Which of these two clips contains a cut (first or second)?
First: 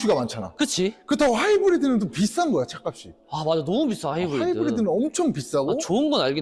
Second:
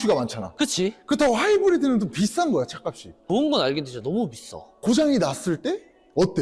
second